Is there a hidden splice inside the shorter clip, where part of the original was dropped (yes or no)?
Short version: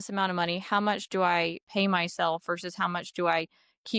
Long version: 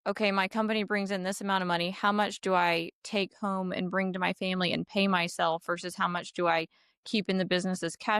yes